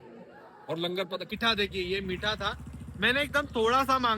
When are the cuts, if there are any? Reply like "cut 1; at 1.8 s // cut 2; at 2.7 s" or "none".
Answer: cut 1; at 1.3 s